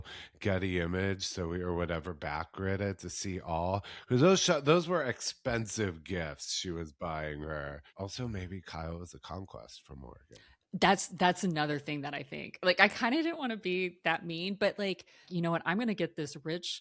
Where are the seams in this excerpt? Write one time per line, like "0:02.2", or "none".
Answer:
0:07.8
0:15.3

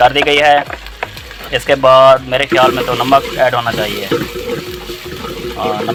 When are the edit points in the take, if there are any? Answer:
none

